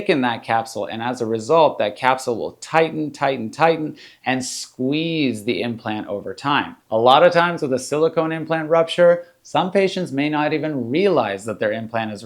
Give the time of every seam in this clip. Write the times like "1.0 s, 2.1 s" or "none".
6.8 s

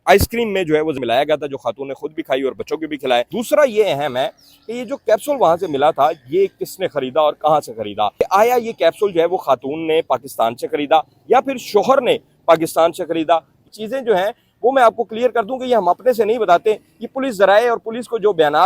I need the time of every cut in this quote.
1.0 s, 3.3 s, 8.1 s, 13.6 s

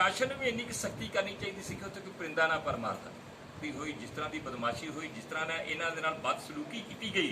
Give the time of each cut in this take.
3.6 s

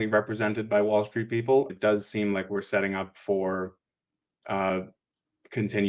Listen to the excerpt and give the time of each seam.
1.7 s, 4.7 s

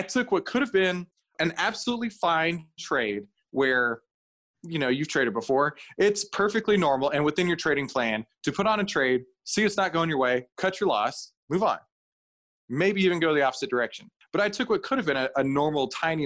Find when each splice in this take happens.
1.3 s

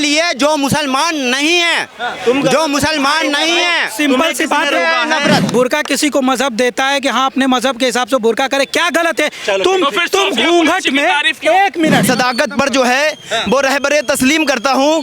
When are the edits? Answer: 5.5 s, 12.0 s

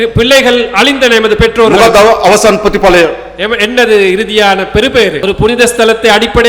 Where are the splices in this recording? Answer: 5.2 s

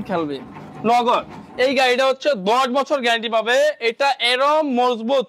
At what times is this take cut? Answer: none

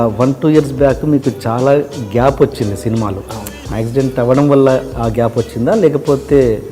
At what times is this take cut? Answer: 3.6 s

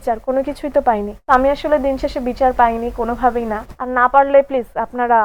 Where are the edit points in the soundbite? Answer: 1.1 s, 3.6 s

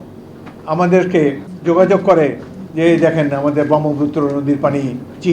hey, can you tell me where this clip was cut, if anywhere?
1.5 s

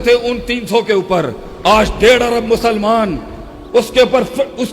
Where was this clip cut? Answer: none

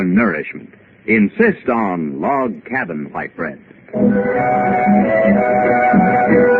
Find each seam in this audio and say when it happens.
4.3 s

